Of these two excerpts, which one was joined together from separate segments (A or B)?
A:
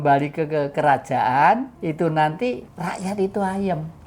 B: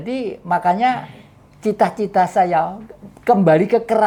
A